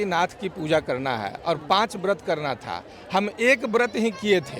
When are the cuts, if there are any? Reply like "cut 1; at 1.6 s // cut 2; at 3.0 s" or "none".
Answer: none